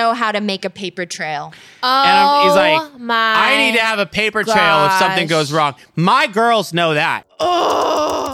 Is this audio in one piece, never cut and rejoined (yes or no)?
no